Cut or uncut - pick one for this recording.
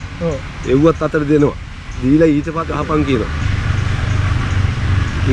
cut